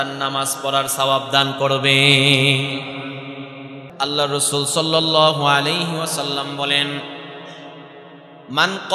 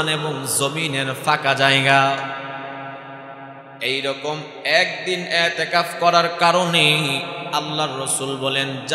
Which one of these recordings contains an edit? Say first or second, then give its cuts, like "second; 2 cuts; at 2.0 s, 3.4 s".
first; 1 cut; at 3.8 s